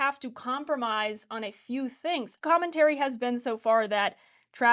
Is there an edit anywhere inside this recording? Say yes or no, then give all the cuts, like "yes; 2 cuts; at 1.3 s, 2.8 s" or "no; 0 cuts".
yes; 1 cut; at 2.4 s